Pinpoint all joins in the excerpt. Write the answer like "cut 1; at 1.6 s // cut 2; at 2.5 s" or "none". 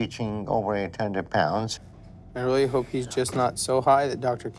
none